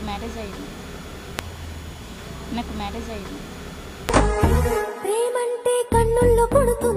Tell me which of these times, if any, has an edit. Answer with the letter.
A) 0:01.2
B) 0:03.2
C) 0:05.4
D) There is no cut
D